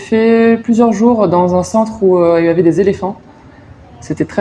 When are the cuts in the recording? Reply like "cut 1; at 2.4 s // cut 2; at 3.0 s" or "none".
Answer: none

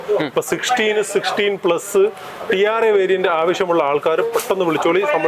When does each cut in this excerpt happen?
none

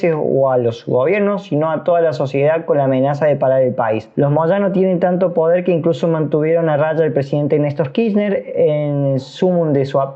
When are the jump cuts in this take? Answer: cut 1; at 4.1 s

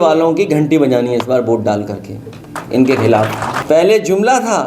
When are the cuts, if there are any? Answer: cut 1; at 3.6 s

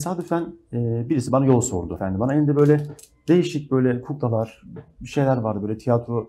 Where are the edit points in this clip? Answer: cut 1; at 2.0 s

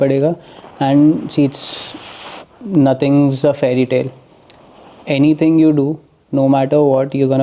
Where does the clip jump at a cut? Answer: none

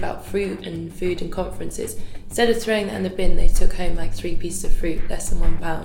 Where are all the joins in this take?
none

